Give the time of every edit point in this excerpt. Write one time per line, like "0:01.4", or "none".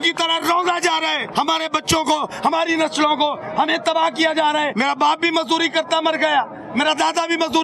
0:01.2
0:04.7